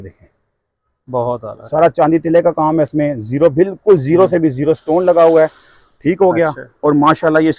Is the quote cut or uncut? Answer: uncut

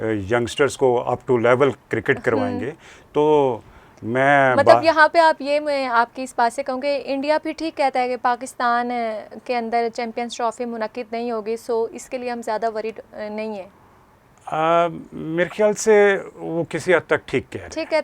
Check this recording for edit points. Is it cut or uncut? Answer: uncut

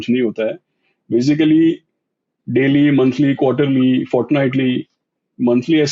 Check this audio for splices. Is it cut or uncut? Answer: uncut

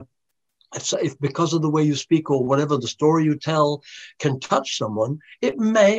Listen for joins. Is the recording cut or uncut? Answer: uncut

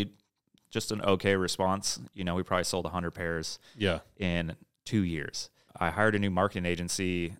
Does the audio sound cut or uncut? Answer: cut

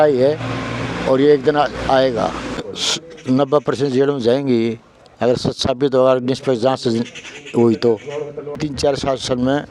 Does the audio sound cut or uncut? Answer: cut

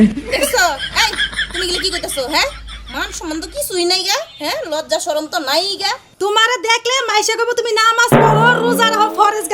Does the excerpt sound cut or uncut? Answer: cut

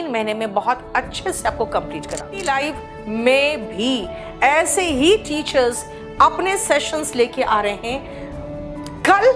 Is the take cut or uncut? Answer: cut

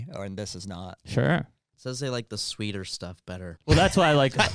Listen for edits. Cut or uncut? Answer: cut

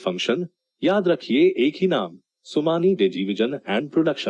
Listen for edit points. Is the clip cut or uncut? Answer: uncut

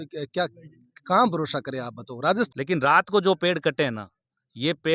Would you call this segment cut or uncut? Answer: cut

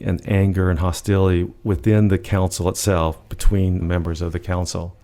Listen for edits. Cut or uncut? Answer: cut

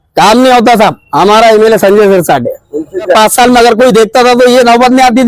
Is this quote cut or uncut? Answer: cut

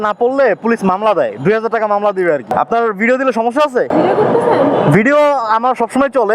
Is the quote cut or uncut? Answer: cut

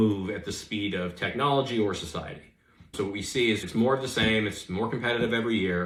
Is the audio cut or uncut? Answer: uncut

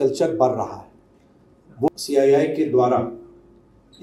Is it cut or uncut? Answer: cut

